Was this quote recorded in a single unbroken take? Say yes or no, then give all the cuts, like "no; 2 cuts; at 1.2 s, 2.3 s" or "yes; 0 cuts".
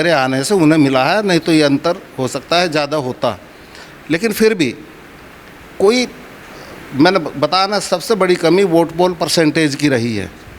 yes; 0 cuts